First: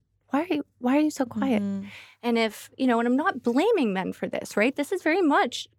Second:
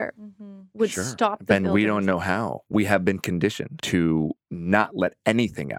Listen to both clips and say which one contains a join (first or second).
second